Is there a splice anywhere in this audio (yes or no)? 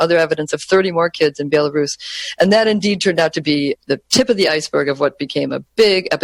no